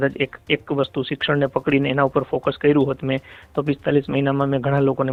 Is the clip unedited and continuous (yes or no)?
yes